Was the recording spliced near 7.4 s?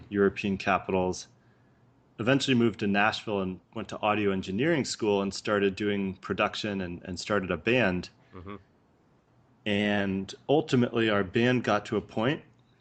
no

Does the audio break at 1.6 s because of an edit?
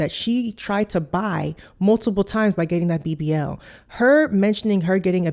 no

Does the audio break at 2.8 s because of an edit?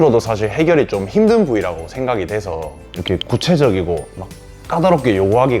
yes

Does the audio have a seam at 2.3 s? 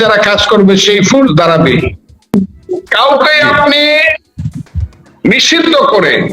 yes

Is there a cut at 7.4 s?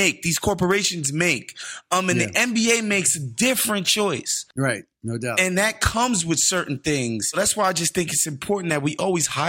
yes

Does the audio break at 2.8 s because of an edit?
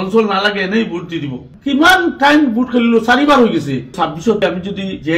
no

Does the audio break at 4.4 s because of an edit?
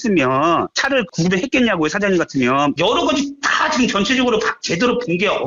no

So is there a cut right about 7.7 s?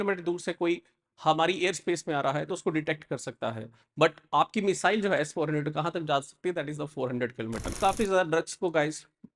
yes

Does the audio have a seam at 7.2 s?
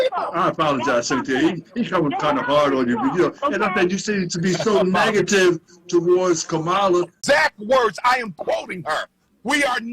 yes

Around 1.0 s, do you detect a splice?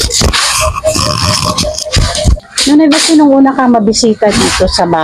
no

